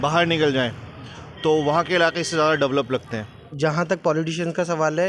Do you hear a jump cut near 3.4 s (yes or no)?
yes